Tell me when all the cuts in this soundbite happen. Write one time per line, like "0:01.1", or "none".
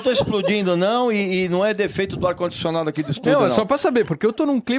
none